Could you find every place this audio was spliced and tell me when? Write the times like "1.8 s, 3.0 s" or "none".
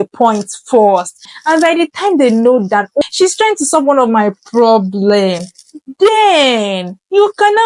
1.2 s, 3.0 s